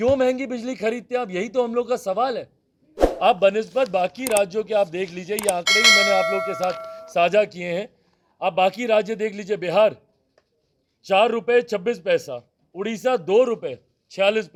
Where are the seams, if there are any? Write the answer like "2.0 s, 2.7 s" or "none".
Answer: none